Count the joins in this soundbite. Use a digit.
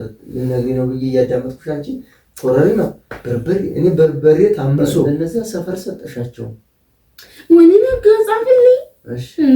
1